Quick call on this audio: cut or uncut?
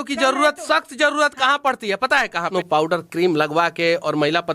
cut